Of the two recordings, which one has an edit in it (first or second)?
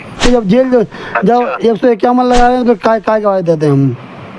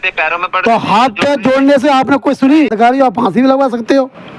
second